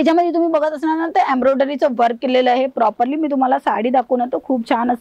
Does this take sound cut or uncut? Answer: uncut